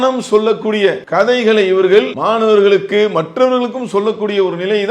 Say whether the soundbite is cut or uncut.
cut